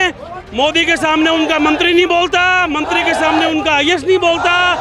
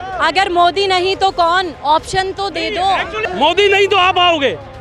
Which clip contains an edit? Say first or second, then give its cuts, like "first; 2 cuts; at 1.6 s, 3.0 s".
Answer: second; 1 cut; at 3.2 s